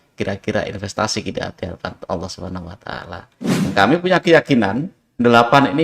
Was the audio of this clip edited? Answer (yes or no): yes